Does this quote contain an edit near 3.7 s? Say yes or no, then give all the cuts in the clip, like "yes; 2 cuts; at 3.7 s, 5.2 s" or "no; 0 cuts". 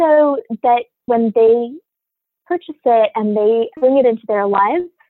yes; 2 cuts; at 1.1 s, 3.7 s